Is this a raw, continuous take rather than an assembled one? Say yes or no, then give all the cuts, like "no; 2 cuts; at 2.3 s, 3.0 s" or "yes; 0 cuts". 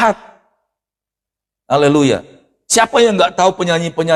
yes; 0 cuts